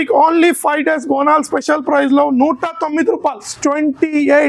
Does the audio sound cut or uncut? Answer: cut